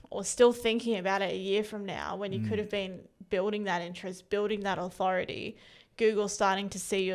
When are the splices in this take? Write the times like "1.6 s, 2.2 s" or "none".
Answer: none